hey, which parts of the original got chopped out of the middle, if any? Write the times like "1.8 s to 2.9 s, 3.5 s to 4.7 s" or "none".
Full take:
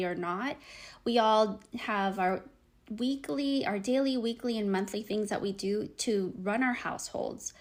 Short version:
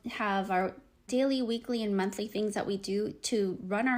2.7 s to 3.8 s

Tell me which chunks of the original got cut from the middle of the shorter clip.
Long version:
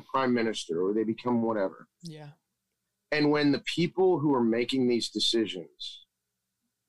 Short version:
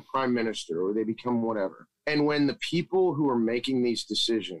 1.9 s to 2.9 s

